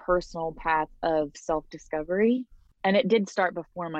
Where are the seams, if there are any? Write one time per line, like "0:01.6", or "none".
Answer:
0:02.6